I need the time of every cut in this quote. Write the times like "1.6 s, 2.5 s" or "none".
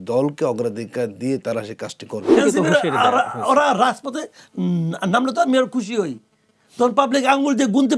2.3 s